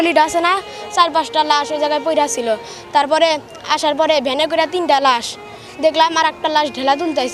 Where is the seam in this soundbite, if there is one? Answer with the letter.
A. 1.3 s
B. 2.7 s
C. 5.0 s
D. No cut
D